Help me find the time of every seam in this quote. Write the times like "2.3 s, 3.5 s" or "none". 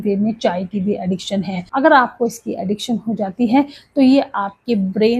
1.6 s

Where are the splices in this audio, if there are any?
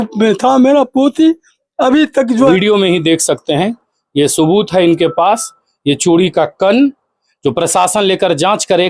2.5 s

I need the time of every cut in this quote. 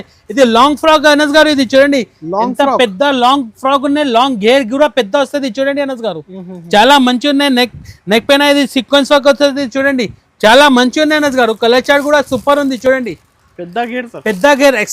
none

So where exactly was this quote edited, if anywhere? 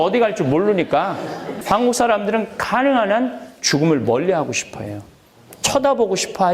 1.5 s

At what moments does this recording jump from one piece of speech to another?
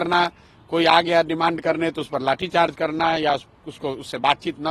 none

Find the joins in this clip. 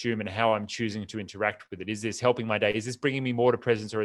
none

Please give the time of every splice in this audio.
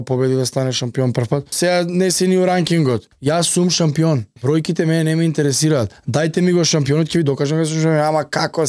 1.5 s, 3.1 s, 4.3 s, 6.0 s

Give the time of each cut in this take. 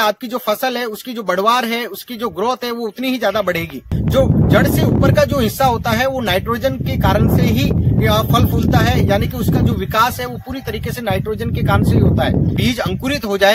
3.9 s, 12.5 s

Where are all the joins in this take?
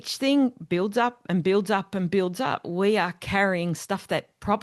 2.6 s

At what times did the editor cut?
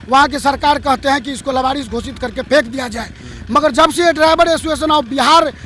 none

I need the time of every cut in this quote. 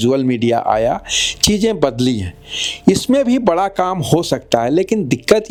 none

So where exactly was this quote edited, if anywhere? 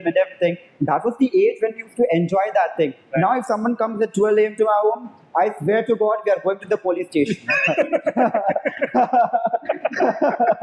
none

